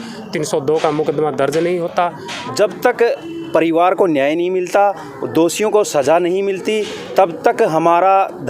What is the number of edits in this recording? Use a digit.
1